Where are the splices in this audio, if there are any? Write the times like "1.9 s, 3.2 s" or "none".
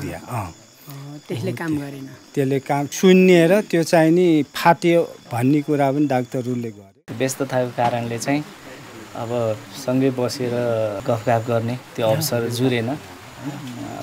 2.9 s, 6.9 s, 11.0 s